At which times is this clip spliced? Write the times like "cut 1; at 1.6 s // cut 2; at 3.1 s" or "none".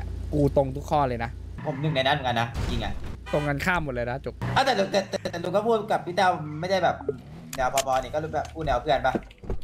cut 1; at 1.6 s // cut 2; at 3.1 s // cut 3; at 4.4 s